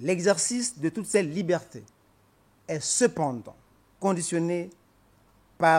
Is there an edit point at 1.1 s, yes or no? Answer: yes